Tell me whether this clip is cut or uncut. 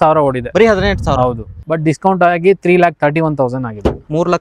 cut